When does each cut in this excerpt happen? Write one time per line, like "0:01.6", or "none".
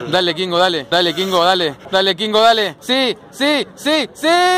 none